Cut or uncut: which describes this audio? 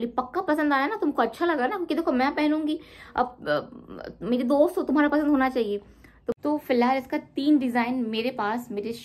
cut